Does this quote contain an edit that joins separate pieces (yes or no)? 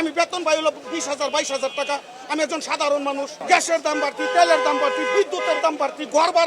yes